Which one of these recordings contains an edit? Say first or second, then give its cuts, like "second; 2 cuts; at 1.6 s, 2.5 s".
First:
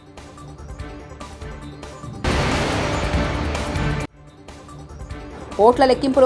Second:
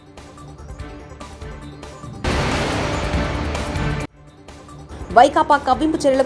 first; 1 cut; at 4.7 s